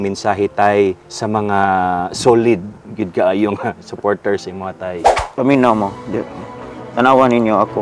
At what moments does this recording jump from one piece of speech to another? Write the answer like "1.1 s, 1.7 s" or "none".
1.1 s, 5.0 s

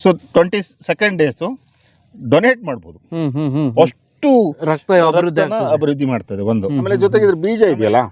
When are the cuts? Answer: 6.9 s

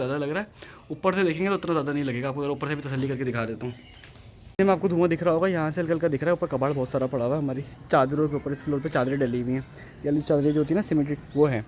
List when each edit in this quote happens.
none

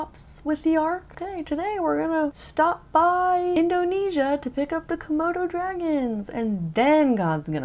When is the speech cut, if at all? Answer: 1.2 s, 2.4 s, 3.5 s

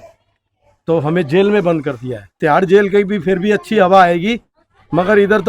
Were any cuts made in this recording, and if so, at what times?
2.4 s

